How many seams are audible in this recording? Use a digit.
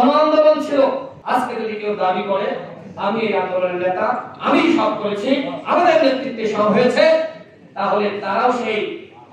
1